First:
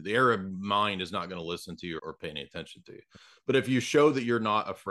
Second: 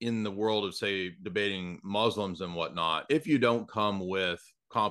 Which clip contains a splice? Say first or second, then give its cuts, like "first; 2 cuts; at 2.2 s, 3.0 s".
first; 1 cut; at 2.0 s